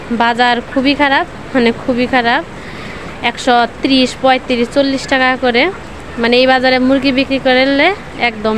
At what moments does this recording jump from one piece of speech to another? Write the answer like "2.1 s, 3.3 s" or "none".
none